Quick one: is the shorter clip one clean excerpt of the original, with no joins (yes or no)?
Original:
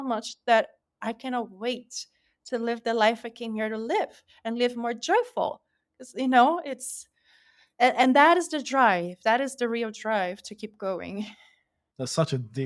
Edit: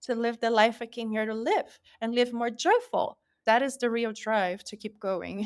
no